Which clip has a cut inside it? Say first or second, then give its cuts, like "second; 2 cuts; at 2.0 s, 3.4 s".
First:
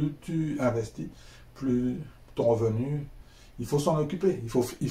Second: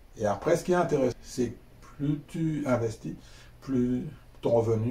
second; 1 cut; at 1.1 s